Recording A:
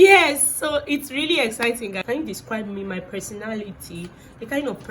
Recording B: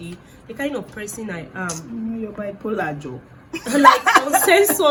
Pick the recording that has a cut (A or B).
A